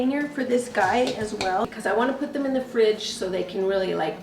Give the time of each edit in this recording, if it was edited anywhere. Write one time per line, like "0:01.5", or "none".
0:01.7